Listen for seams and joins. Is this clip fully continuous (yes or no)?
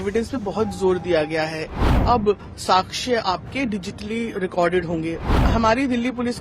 no